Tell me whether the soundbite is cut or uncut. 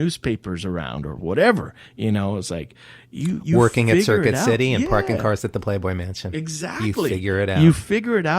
uncut